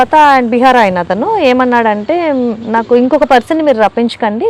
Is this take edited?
no; 0 cuts

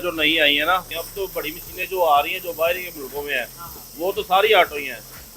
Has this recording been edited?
yes; 1 cut; at 1.0 s

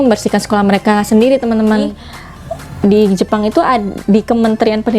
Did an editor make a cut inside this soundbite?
yes; 1 cut; at 1.8 s

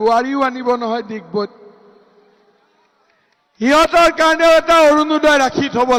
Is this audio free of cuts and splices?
yes; 0 cuts

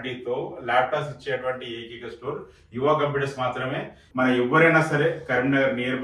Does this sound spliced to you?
yes; 1 cut; at 4.0 s

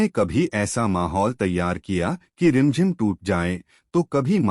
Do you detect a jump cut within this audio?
yes; 1 cut; at 2.7 s

